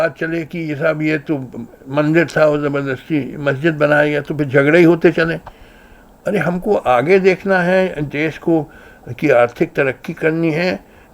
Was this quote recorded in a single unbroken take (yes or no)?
yes